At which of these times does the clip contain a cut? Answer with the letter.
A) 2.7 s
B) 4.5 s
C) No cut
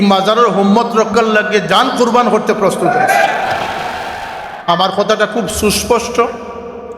B